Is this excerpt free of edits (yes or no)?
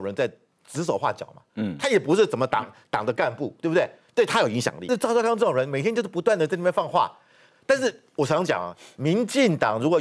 no